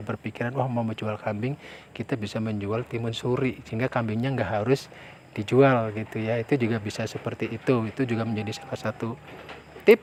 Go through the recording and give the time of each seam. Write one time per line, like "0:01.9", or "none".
none